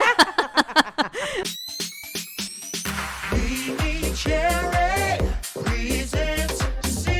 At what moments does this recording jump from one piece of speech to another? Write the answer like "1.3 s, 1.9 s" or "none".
1.5 s